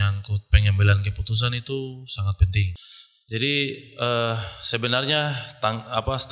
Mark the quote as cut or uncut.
cut